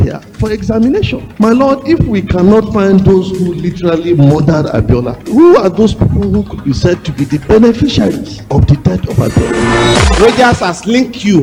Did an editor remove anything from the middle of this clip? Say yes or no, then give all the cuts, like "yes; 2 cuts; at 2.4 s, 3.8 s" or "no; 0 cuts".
no; 0 cuts